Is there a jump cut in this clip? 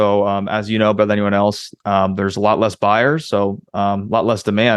no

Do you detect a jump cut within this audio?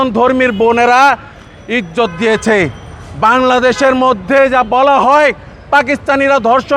no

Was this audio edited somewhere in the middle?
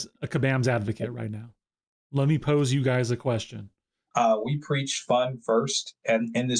yes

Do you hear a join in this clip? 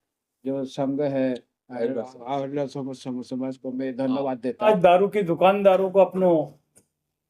yes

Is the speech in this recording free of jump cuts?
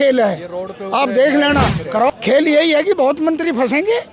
no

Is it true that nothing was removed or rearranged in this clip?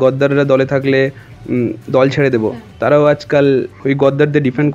no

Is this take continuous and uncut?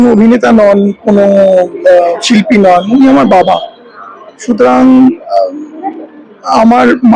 yes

